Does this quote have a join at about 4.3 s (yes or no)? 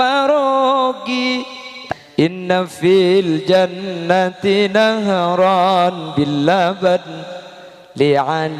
no